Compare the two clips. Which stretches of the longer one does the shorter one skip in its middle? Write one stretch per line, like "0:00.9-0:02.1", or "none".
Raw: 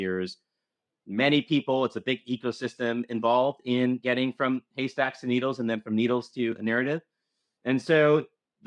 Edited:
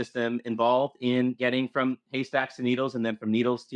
none